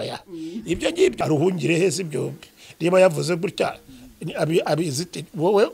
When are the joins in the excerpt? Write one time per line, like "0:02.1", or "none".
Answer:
0:01.2